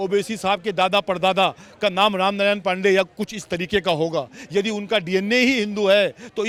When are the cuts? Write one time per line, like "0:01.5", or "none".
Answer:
none